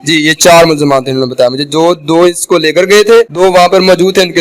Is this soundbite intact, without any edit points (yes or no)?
no